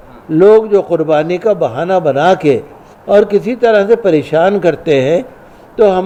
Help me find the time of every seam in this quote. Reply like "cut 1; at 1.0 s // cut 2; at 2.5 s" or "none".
none